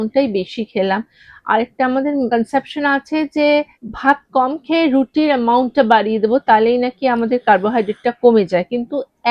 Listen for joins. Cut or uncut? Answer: cut